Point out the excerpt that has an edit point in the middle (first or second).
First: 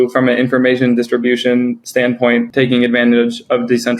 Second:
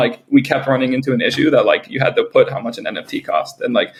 first